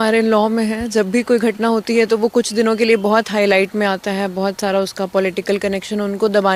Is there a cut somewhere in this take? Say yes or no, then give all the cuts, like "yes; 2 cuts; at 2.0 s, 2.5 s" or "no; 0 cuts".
no; 0 cuts